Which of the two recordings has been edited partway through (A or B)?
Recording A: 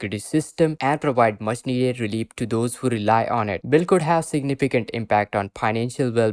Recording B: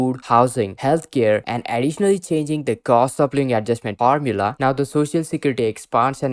B